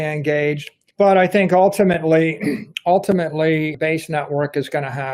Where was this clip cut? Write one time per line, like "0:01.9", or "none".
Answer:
0:02.7
0:03.7